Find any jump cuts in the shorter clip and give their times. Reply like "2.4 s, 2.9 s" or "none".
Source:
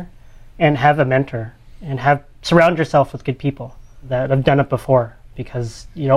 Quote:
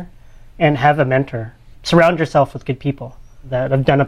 1.7 s